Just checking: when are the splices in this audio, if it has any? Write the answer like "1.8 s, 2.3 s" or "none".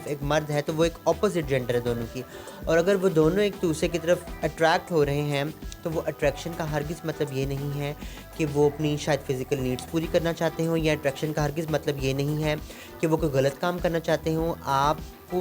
none